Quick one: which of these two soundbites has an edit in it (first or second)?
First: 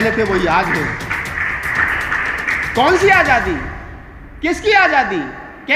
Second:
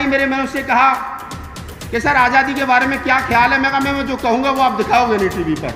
first